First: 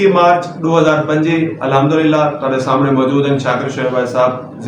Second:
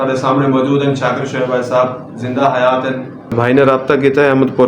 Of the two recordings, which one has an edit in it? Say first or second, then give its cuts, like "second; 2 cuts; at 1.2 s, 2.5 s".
second; 1 cut; at 3.3 s